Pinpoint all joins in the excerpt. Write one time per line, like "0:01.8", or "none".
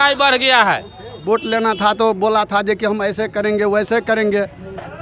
0:01.2